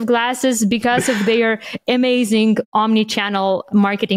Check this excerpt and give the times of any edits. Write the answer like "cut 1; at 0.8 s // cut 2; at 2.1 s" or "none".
cut 1; at 2.7 s